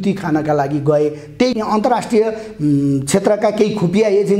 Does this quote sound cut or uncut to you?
cut